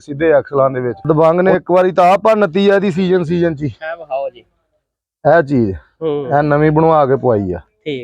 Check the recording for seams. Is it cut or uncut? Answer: cut